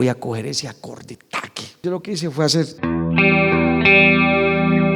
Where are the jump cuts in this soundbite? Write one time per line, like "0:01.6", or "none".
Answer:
0:01.8